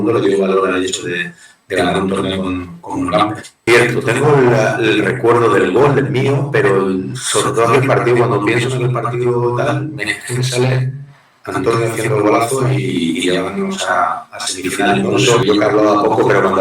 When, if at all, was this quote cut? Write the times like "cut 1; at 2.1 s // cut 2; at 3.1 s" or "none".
cut 1; at 3.6 s // cut 2; at 15.4 s

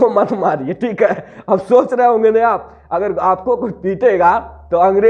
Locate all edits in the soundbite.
none

